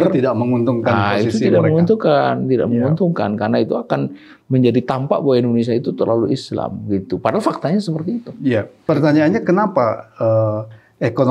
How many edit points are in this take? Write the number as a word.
one